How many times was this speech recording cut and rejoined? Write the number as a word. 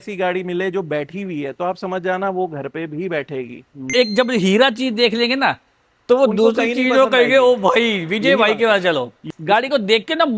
two